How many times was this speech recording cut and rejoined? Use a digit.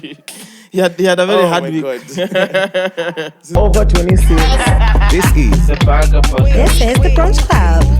1